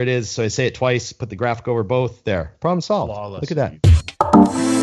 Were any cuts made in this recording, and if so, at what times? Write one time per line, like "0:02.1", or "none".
0:03.7